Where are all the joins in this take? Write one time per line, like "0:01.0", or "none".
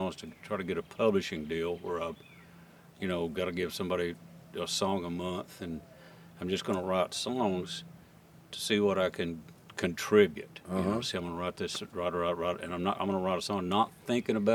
none